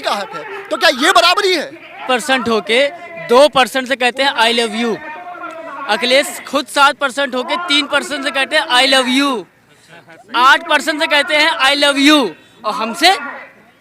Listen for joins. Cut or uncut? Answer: cut